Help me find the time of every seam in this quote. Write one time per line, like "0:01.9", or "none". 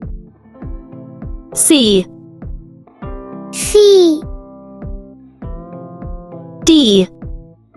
none